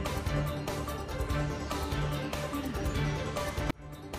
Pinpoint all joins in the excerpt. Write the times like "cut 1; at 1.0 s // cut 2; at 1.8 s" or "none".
cut 1; at 1.0 s // cut 2; at 2.4 s

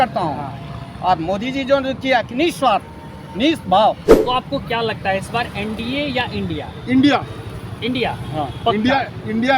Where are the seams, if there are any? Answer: cut 1; at 4.1 s

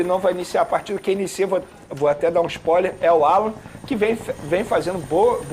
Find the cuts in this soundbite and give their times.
none

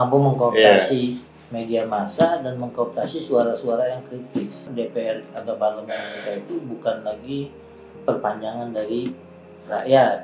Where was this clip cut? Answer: cut 1; at 4.7 s

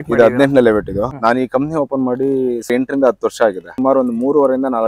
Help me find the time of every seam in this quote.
cut 1; at 1.1 s // cut 2; at 2.7 s // cut 3; at 3.7 s

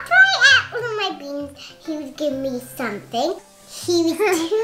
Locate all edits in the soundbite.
cut 1; at 3.4 s

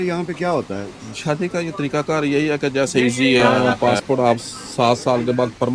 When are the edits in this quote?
cut 1; at 3.6 s

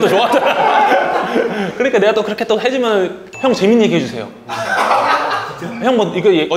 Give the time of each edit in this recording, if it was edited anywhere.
none

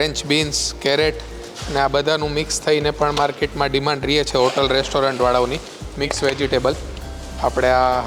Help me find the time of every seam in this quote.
none

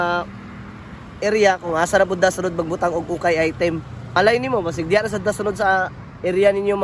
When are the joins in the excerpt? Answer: cut 1; at 4.1 s

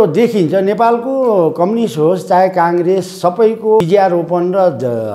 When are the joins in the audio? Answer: cut 1; at 3.8 s

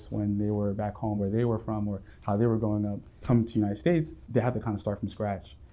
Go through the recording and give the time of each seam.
cut 1; at 1.2 s // cut 2; at 3.2 s // cut 3; at 4.2 s

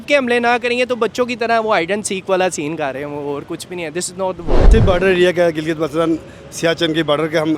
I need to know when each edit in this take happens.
cut 1; at 4.7 s

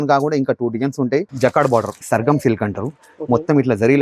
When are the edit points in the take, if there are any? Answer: cut 1; at 1.3 s // cut 2; at 2.0 s

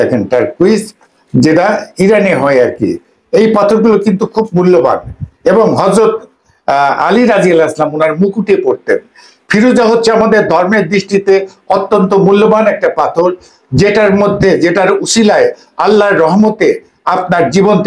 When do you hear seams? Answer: none

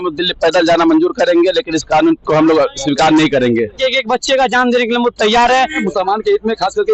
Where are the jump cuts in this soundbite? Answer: cut 1; at 3.8 s // cut 2; at 5.8 s

